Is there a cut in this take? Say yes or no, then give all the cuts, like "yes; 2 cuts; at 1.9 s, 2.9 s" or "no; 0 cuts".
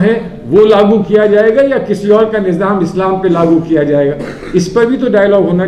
no; 0 cuts